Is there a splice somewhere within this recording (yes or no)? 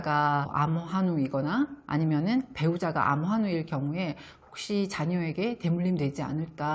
no